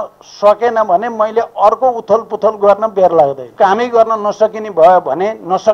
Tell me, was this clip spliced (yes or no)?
yes